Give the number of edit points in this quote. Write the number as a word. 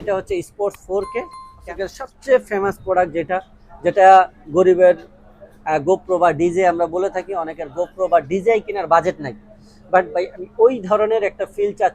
one